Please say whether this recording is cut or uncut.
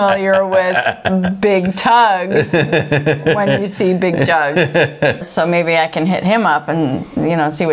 cut